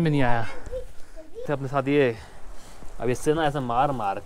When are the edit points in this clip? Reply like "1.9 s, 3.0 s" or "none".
1.5 s

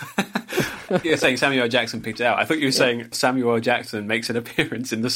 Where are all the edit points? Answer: none

